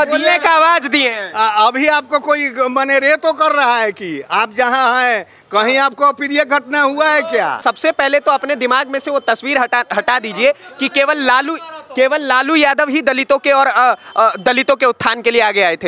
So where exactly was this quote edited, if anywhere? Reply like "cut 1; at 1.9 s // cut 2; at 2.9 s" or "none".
cut 1; at 7.6 s